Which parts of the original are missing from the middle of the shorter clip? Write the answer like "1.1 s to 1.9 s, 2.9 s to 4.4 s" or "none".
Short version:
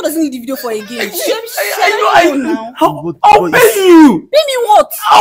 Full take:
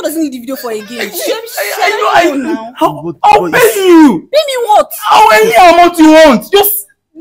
none